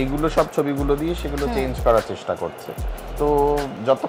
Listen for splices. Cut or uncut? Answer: uncut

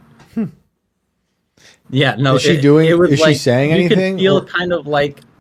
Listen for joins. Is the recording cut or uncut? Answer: uncut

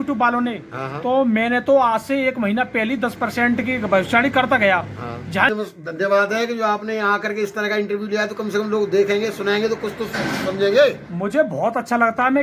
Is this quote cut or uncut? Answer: cut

